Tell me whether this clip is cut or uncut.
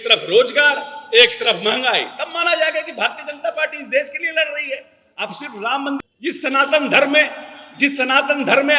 cut